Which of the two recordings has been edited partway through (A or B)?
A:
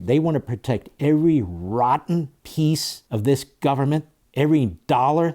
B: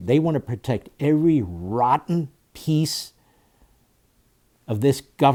A